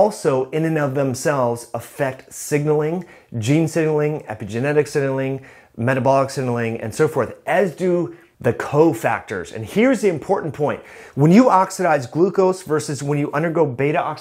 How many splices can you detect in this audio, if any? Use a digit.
1